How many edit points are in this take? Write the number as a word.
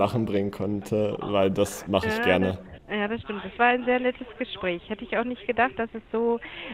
one